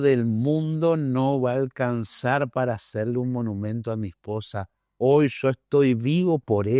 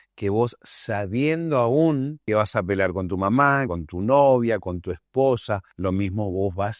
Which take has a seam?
second; 3 cuts; at 2.2 s, 3.7 s, 5.7 s

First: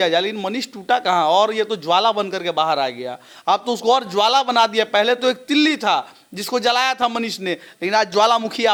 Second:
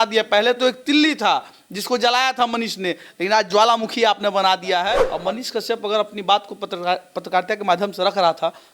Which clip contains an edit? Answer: second; 1 cut; at 5.1 s

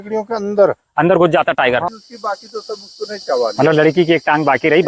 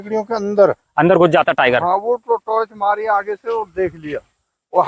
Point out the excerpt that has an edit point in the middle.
first; 1 cut; at 1.9 s

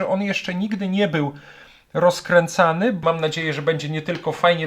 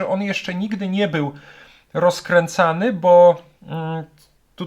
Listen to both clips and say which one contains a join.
first; 1 cut; at 3.0 s

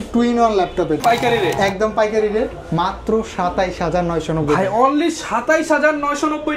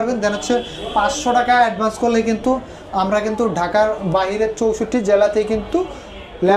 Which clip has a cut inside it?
first; 1 cut; at 1.0 s

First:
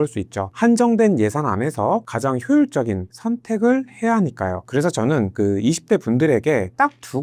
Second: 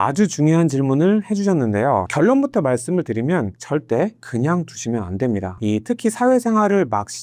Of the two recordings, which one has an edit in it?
second; 1 cut; at 5.5 s

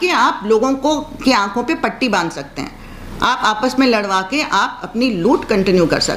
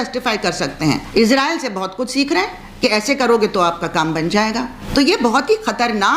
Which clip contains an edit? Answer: second; 2 cuts; at 1.0 s, 4.8 s

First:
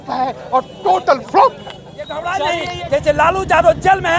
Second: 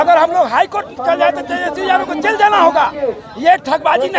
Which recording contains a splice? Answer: first; 1 cut; at 1.6 s

